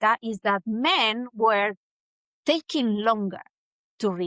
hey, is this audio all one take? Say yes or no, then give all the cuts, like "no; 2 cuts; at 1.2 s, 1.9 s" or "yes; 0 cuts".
yes; 0 cuts